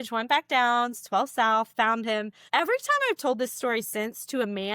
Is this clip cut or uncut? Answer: uncut